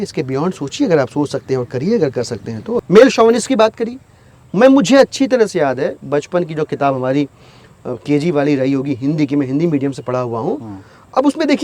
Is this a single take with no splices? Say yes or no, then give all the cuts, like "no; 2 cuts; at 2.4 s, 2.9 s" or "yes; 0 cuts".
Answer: no; 1 cut; at 2.7 s